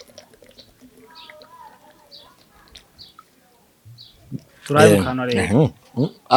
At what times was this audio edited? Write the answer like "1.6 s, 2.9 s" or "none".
none